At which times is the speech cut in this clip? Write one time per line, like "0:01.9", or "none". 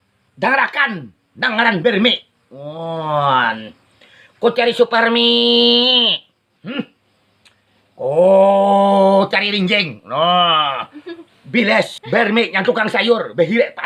none